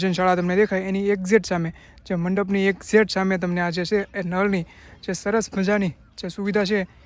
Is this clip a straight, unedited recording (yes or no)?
yes